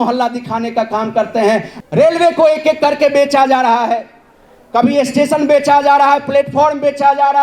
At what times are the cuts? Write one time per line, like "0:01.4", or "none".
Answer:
0:01.7

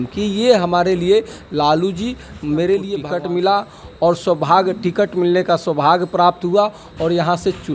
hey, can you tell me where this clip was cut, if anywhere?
0:03.1

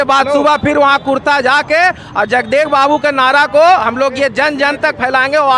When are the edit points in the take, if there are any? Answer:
none

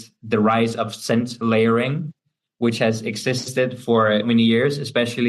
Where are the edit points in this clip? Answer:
0:04.3

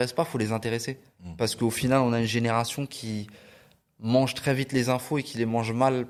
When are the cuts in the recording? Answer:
none

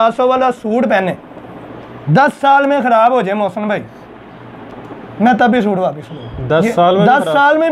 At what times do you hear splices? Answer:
none

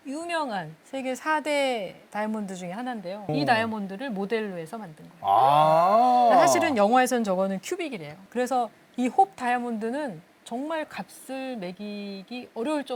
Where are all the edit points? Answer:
none

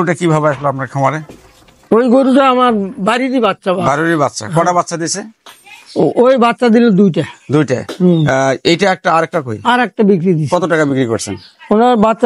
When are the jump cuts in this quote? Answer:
none

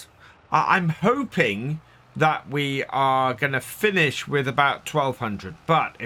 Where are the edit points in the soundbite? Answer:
none

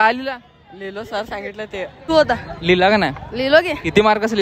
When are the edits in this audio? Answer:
0:02.1

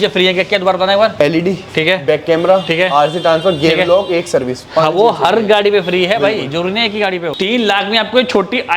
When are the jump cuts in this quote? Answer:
0:01.1
0:07.3

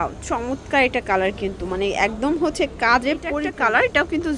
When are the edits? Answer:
0:03.4

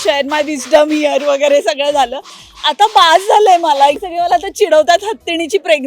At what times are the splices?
0:04.0

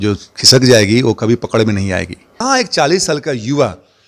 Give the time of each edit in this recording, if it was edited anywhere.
0:02.3

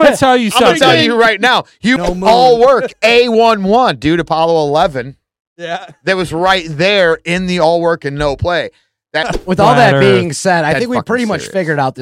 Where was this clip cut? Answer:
0:02.0
0:09.2

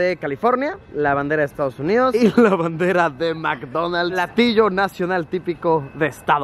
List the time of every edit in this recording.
0:04.2

